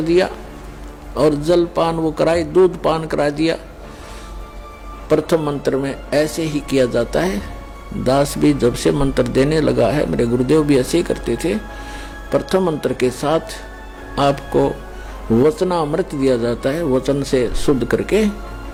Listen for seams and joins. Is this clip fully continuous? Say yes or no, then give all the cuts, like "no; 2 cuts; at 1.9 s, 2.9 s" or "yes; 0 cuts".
yes; 0 cuts